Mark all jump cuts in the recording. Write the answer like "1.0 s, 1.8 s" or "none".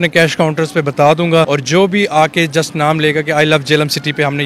1.5 s